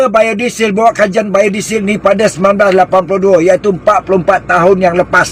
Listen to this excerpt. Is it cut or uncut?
uncut